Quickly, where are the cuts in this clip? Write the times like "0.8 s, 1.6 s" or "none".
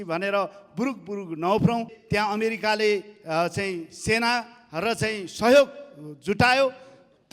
2.0 s